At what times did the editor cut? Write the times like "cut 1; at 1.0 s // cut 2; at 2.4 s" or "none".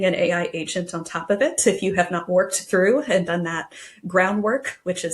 none